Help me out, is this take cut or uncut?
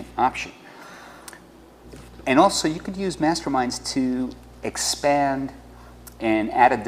uncut